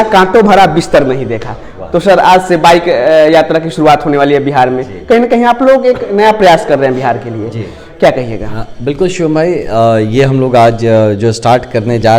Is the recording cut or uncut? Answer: uncut